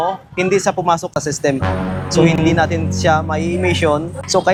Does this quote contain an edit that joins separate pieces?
no; 0 cuts

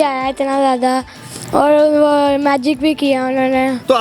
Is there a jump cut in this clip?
no; 0 cuts

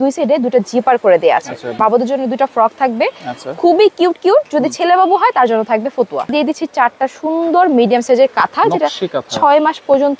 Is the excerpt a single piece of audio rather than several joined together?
no; 2 cuts; at 1.8 s, 6.3 s

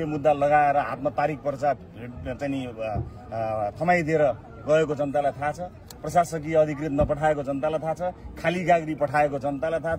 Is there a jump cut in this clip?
no; 0 cuts

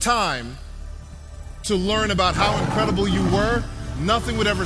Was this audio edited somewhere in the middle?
no; 0 cuts

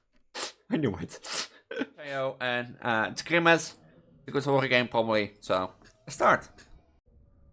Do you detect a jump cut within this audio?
yes; 1 cut; at 2.1 s

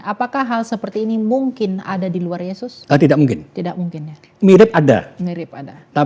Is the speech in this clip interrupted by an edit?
yes; 2 cuts; at 2.7 s, 4.2 s

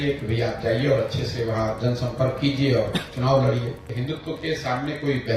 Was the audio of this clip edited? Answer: yes; 1 cut; at 3.9 s

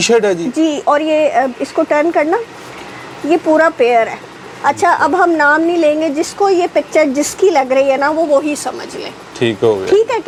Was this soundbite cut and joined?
no; 0 cuts

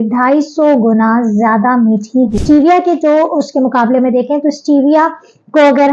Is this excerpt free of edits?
no; 1 cut; at 2.4 s

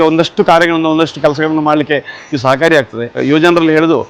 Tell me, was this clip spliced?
yes; 1 cut; at 3.2 s

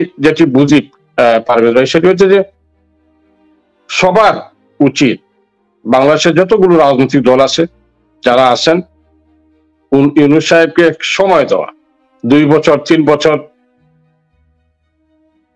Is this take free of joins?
yes; 0 cuts

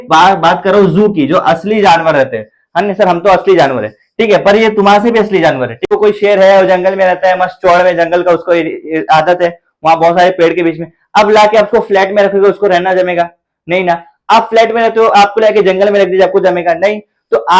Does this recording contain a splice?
yes; 1 cut; at 5.9 s

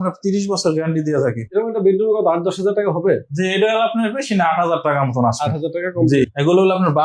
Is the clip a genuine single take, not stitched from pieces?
no; 2 cuts; at 1.4 s, 6.2 s

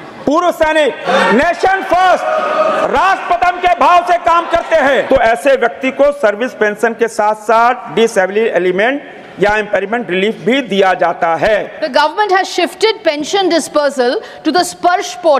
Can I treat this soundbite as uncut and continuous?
no; 3 cuts; at 1.0 s, 5.0 s, 11.8 s

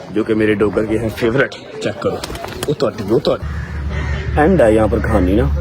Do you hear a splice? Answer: yes; 1 cut; at 3.4 s

